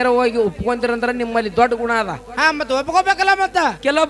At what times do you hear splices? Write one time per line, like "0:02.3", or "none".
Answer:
none